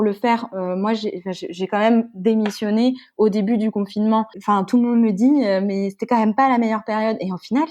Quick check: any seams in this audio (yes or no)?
yes